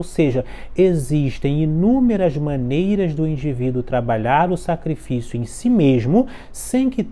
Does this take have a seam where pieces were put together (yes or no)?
no